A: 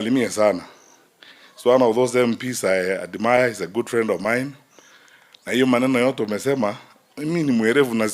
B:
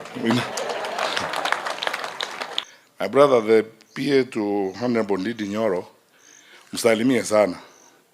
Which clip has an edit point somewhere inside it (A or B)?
B